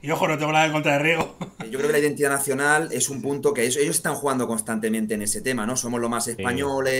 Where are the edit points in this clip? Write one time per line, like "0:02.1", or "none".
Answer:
0:01.7